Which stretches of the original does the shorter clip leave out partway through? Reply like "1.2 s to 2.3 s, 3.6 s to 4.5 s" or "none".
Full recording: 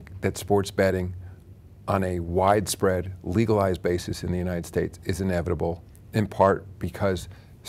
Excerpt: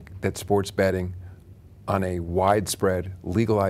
none